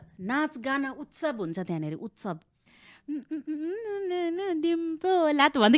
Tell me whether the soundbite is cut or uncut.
cut